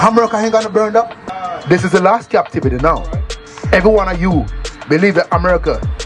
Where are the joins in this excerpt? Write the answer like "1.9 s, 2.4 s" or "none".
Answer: 1.2 s